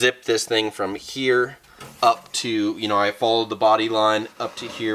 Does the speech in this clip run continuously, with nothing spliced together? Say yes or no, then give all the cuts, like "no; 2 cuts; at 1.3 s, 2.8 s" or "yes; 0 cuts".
yes; 0 cuts